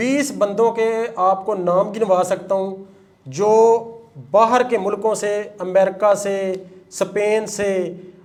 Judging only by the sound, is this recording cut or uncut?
uncut